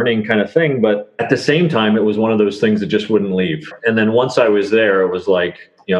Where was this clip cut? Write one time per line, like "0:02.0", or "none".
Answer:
0:01.1
0:03.7